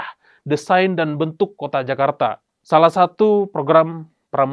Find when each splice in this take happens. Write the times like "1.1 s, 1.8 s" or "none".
2.5 s